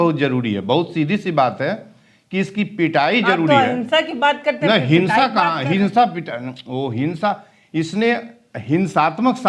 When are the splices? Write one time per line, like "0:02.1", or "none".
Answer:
none